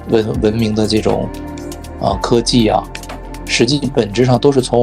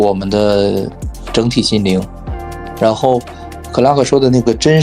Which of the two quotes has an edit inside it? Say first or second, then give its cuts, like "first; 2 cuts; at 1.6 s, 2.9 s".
second; 1 cut; at 1.0 s